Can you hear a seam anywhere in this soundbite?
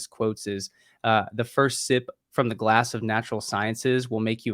no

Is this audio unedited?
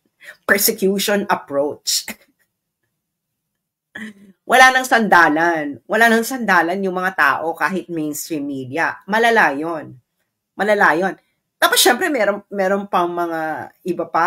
yes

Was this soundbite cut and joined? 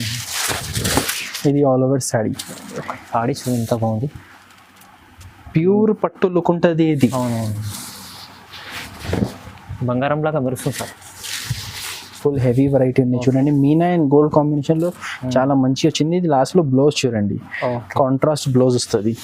no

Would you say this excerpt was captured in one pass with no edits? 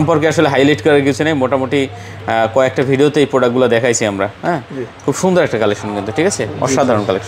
yes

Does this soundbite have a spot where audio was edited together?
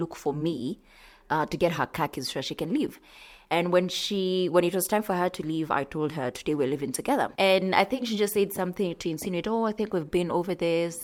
no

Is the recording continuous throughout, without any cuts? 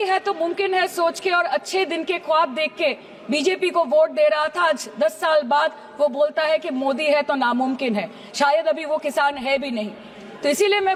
yes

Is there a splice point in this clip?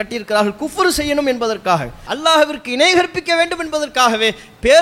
yes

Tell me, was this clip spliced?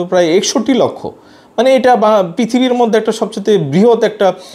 no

